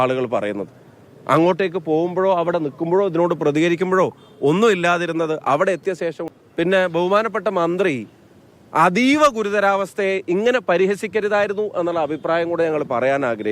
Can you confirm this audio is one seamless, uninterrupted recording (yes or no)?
no